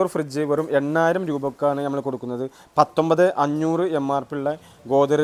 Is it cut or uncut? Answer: uncut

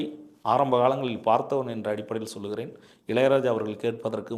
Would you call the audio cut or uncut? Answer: uncut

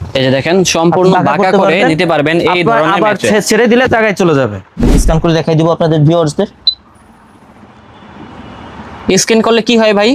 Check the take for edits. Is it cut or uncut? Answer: cut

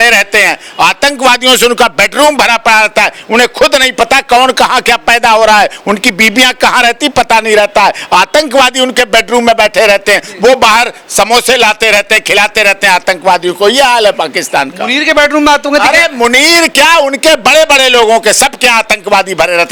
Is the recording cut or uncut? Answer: uncut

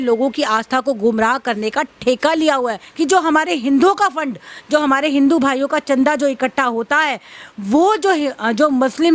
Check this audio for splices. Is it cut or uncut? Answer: cut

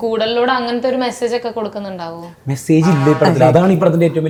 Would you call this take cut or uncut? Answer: uncut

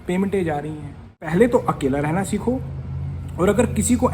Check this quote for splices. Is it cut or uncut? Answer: cut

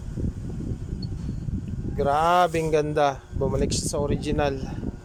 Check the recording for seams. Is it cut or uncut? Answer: uncut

